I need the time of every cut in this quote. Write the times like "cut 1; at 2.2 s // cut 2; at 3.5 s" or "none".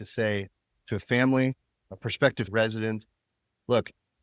cut 1; at 2.5 s